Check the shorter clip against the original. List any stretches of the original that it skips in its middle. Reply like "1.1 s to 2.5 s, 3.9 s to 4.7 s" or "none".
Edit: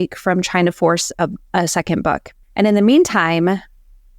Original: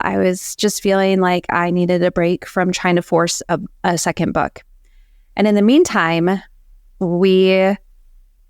4.7 s to 5.2 s